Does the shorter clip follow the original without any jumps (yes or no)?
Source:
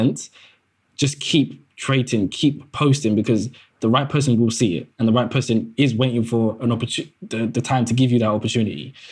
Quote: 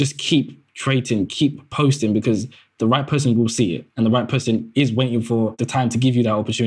no